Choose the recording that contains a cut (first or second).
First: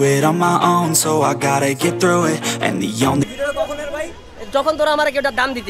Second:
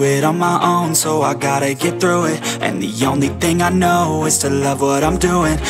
first